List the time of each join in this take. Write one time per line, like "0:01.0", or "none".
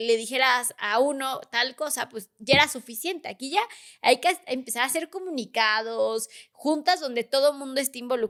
none